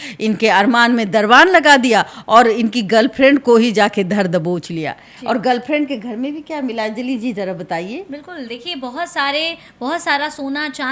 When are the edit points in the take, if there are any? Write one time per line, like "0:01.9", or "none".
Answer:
none